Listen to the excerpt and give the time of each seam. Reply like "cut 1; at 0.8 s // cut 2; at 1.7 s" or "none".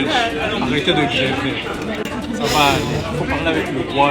cut 1; at 2.1 s